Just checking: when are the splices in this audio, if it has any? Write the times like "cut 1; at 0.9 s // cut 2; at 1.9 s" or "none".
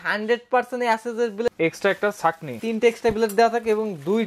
cut 1; at 1.5 s // cut 2; at 2.6 s